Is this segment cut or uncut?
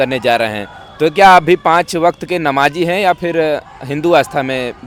uncut